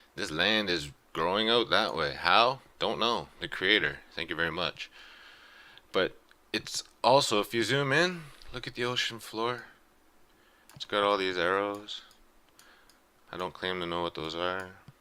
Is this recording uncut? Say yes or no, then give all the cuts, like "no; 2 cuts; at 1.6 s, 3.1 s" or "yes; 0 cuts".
yes; 0 cuts